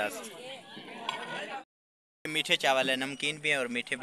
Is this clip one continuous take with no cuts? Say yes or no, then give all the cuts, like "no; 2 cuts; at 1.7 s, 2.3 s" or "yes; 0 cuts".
no; 1 cut; at 1.7 s